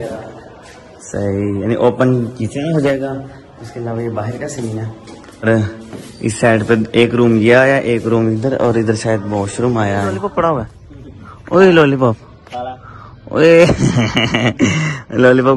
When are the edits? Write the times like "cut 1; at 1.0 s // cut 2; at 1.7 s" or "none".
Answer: cut 1; at 5.5 s // cut 2; at 10.2 s